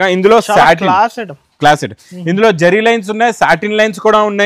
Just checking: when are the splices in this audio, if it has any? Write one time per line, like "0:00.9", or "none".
none